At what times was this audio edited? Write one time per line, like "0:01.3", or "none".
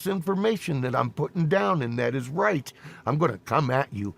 0:01.1